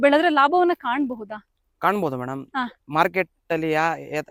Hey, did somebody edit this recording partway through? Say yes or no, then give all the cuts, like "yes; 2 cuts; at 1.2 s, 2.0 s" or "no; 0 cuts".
no; 0 cuts